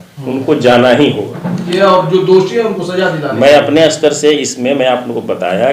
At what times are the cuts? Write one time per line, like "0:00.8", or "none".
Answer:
0:01.7